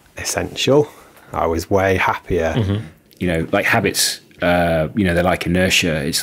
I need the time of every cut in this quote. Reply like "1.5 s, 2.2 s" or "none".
3.0 s